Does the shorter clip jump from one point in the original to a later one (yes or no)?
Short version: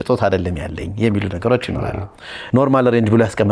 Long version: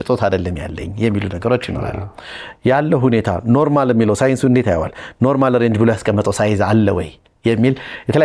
yes